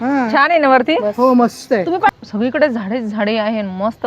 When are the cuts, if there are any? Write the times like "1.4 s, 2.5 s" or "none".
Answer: 2.1 s